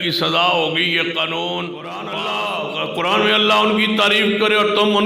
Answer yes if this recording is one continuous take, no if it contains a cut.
no